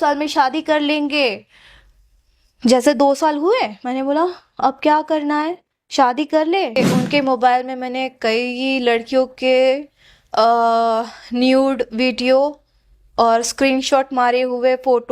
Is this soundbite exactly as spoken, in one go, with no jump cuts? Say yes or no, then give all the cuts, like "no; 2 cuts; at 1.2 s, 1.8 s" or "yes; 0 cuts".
no; 1 cut; at 6.8 s